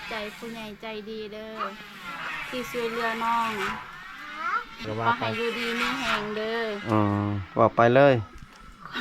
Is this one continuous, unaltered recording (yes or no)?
no